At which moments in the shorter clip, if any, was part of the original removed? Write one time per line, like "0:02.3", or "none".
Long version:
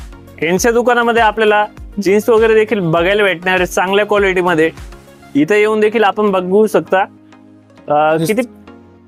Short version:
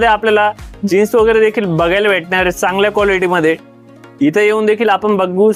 none